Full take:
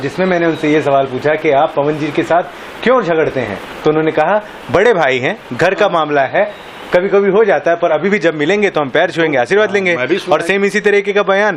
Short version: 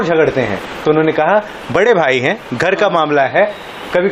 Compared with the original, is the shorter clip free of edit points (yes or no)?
yes